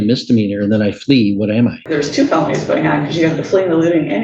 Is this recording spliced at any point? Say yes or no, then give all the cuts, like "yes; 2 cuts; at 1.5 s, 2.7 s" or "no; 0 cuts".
yes; 1 cut; at 1.8 s